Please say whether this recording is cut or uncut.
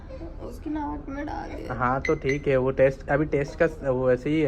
uncut